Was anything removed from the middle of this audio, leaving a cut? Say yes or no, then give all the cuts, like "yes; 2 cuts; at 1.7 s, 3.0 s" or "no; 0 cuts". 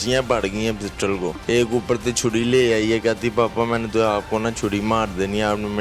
yes; 1 cut; at 1.4 s